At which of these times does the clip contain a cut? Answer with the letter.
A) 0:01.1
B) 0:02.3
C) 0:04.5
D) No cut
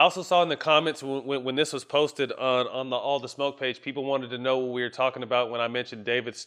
D